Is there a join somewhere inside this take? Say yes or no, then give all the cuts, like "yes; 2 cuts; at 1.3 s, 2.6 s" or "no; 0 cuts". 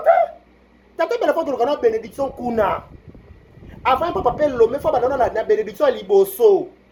no; 0 cuts